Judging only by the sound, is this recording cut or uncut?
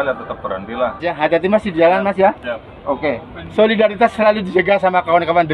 cut